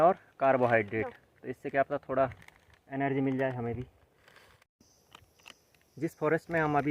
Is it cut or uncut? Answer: cut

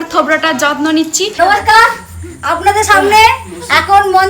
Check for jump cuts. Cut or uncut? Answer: cut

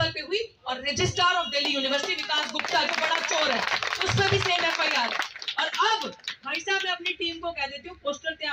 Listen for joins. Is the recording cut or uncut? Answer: uncut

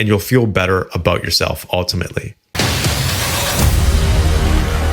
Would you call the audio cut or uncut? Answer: cut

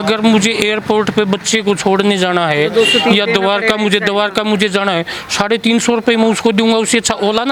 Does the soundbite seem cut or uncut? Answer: uncut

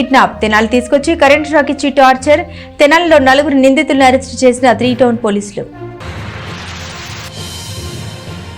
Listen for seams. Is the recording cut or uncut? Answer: uncut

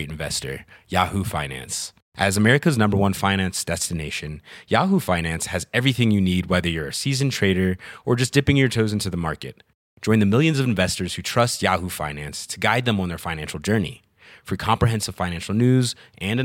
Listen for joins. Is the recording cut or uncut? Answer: uncut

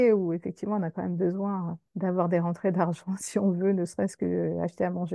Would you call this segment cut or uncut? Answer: cut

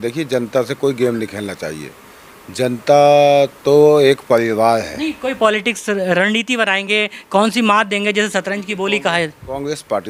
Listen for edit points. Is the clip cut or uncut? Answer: uncut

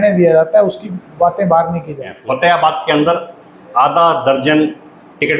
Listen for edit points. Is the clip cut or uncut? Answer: cut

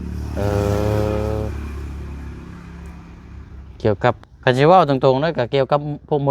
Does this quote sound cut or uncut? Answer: cut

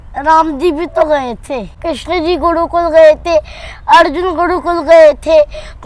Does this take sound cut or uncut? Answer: cut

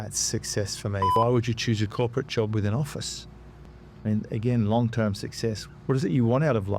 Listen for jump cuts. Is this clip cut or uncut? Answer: cut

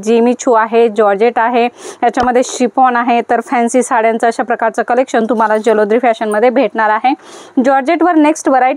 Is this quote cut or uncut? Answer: uncut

